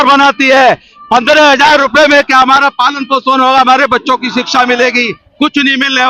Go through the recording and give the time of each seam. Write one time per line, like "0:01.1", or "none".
none